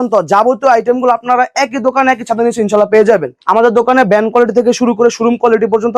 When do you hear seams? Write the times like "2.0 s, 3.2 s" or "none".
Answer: 3.3 s